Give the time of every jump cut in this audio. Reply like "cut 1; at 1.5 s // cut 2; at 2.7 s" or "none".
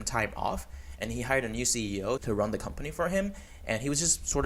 cut 1; at 2.2 s